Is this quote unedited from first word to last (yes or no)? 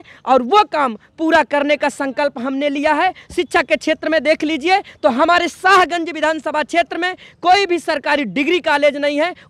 yes